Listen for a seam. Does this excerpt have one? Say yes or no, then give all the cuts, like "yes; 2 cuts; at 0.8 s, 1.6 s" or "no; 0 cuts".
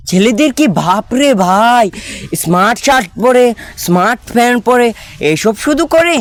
no; 0 cuts